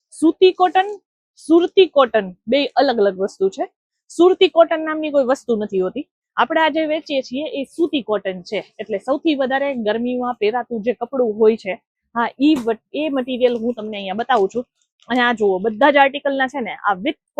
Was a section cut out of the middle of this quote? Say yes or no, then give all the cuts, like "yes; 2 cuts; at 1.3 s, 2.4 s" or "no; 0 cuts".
no; 0 cuts